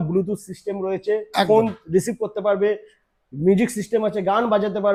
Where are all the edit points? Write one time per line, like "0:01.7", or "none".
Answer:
none